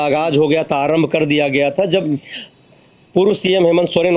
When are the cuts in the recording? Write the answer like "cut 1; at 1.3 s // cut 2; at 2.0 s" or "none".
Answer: none